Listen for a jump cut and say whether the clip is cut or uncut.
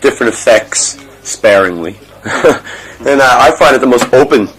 cut